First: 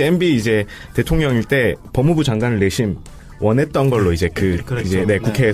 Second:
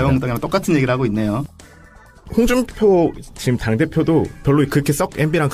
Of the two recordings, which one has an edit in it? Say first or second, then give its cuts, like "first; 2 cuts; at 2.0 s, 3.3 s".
second; 1 cut; at 2.1 s